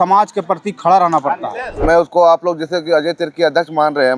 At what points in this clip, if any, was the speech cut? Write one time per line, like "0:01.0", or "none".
0:01.8